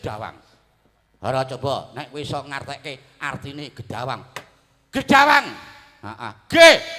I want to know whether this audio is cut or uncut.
uncut